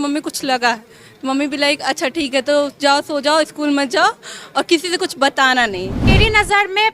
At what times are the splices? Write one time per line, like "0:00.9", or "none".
0:06.0